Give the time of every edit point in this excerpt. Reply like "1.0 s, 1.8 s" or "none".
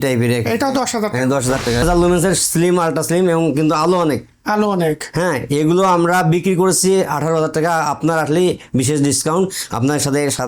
1.8 s